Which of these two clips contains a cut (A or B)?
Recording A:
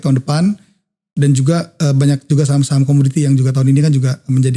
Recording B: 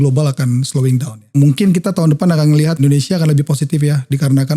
B